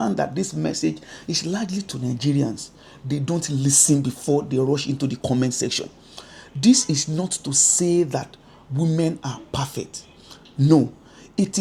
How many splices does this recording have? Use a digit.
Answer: 0